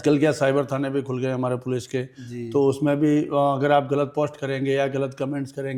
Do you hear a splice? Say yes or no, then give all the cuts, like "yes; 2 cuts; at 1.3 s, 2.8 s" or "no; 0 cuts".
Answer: no; 0 cuts